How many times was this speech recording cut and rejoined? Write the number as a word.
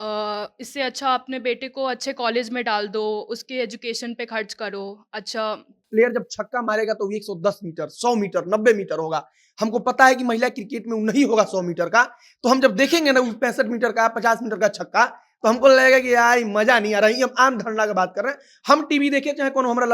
one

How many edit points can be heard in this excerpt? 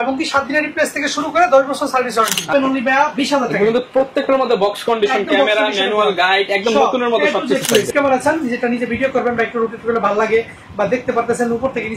two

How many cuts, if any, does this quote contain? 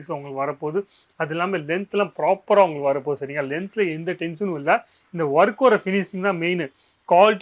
zero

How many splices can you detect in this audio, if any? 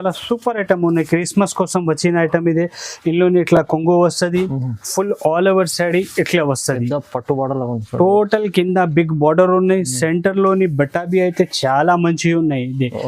zero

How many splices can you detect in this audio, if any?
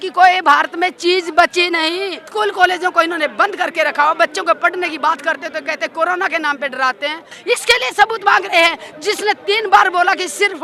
two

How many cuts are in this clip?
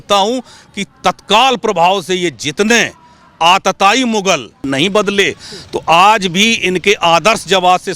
one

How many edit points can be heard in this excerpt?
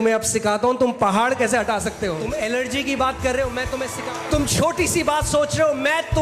two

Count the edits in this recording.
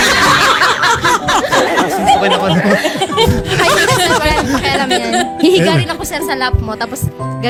zero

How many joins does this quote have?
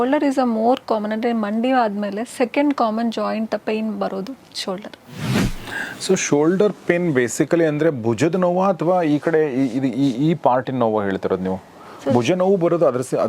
one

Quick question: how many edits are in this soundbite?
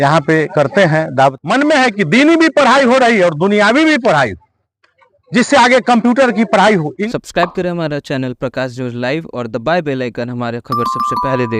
two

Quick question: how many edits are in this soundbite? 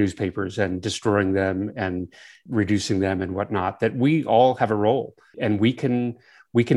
two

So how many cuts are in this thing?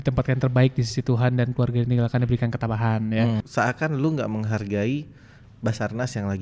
one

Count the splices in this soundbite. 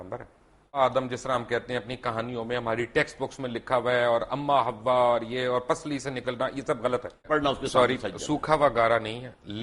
two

